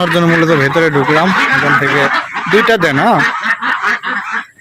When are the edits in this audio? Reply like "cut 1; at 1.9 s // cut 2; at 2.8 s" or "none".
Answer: cut 1; at 2.1 s